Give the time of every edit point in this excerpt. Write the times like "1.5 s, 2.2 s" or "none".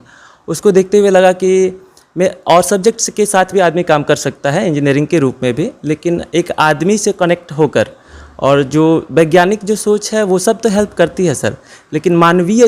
none